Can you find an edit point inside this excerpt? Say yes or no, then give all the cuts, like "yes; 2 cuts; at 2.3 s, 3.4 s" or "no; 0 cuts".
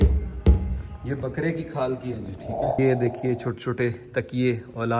yes; 1 cut; at 2.8 s